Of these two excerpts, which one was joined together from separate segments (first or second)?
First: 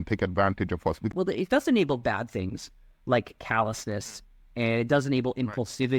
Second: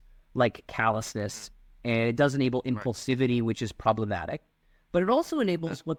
first